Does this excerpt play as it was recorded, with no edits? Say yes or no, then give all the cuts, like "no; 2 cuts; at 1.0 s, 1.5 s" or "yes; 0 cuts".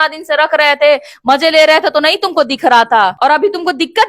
no; 1 cut; at 3.1 s